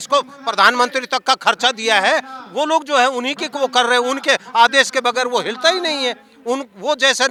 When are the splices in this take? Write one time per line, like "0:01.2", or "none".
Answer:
none